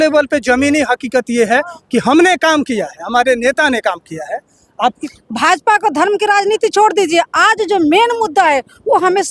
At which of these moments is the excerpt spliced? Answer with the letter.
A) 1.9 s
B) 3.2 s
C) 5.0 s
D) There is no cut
C